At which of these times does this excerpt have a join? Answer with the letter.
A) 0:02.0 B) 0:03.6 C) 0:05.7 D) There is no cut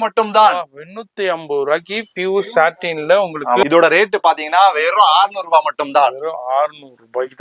B